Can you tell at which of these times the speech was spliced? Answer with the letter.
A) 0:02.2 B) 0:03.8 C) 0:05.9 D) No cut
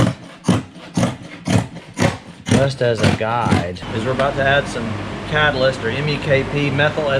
B